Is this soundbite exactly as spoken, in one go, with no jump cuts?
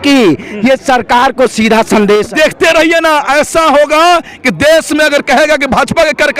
no; 1 cut; at 2.3 s

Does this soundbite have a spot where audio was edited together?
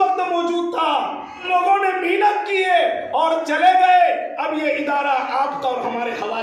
yes; 1 cut; at 1.4 s

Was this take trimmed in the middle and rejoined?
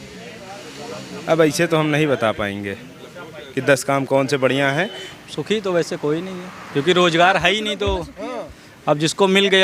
yes; 1 cut; at 5.0 s

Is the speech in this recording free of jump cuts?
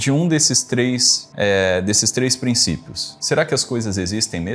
no; 2 cuts; at 1.2 s, 3.1 s

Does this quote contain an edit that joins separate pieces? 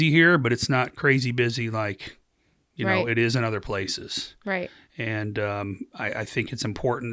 no; 0 cuts

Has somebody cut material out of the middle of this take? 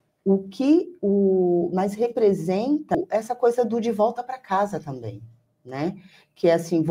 yes; 1 cut; at 3.0 s

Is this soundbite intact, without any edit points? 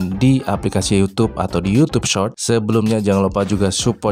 no; 1 cut; at 2.4 s

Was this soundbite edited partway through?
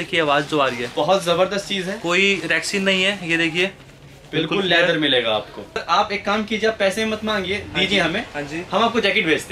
yes; 1 cut; at 5.8 s

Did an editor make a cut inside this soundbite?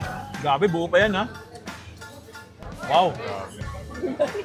no; 0 cuts

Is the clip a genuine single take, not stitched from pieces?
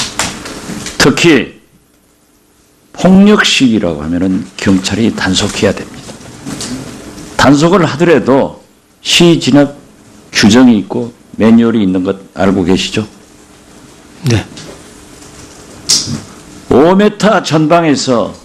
no; 1 cut; at 14.2 s

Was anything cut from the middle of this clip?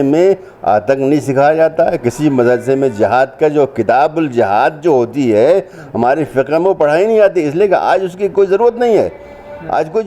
no; 0 cuts

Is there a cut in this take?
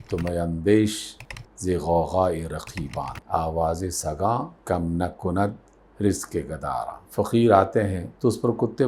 yes; 1 cut; at 7.0 s

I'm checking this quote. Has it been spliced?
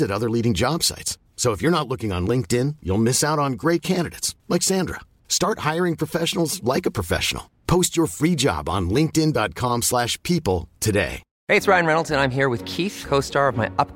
yes; 1 cut; at 11.3 s

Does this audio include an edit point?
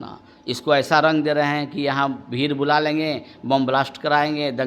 no; 0 cuts

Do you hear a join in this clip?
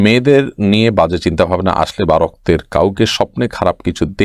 no; 0 cuts

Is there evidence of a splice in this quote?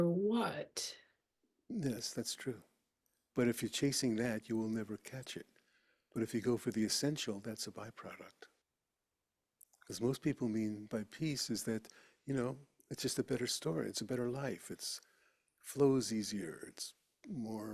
yes; 1 cut; at 8.6 s

